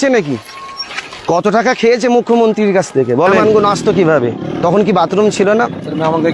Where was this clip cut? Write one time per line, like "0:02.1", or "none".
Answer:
0:03.4